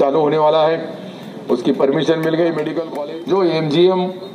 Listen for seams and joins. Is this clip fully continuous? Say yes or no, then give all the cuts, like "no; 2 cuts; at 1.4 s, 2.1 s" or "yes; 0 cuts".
no; 1 cut; at 2.8 s